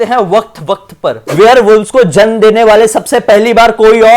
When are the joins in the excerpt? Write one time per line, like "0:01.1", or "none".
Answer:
0:01.2